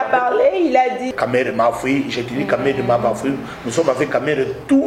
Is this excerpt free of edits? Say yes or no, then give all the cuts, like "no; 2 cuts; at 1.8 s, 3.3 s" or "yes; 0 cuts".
no; 1 cut; at 1.1 s